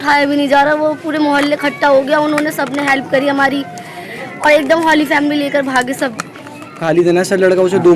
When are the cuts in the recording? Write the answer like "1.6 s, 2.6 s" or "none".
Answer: 6.8 s